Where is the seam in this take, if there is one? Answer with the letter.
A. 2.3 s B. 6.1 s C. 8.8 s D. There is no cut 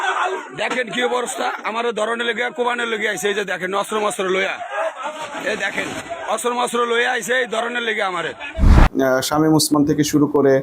C